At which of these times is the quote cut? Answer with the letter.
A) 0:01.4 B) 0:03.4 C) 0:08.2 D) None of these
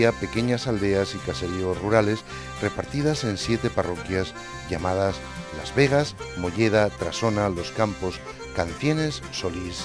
B